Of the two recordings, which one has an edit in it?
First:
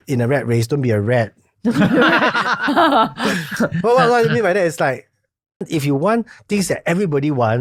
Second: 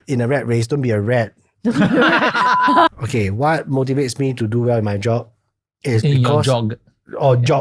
second; 1 cut; at 2.9 s

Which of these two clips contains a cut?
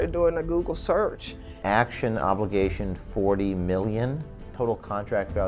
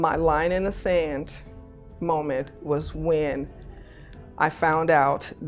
first; 2 cuts; at 1.3 s, 4.4 s

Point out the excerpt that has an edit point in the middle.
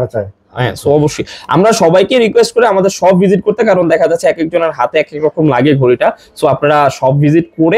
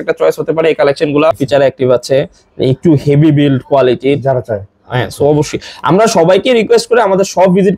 second; 1 cut; at 1.4 s

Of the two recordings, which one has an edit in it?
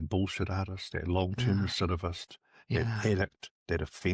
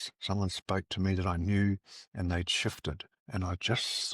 second; 1 cut; at 3.1 s

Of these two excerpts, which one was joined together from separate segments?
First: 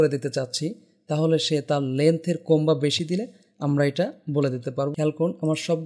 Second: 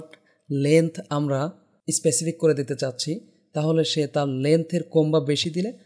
first; 1 cut; at 4.9 s

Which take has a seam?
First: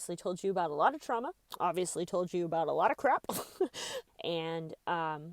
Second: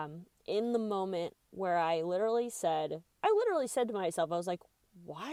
first; 1 cut; at 3.9 s

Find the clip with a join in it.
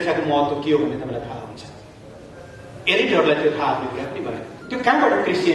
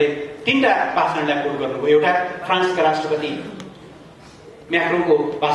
first; 1 cut; at 4.5 s

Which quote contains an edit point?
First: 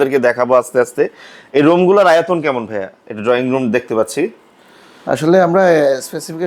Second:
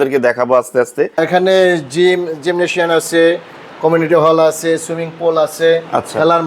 second; 1 cut; at 1.2 s

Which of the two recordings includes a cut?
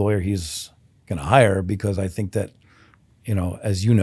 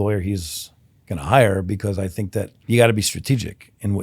second; 1 cut; at 2.5 s

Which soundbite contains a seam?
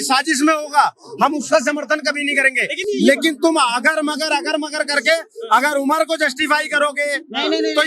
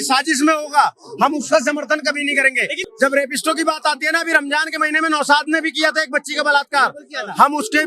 second; 1 cut; at 2.8 s

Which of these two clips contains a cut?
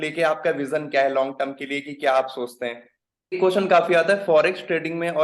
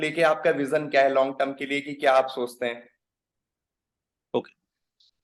first; 1 cut; at 3.4 s

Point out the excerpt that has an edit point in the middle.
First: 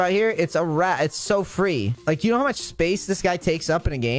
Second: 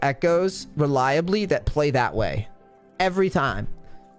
first; 1 cut; at 1.9 s

